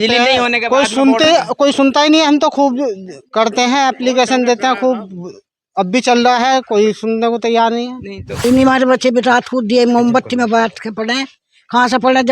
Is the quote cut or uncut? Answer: cut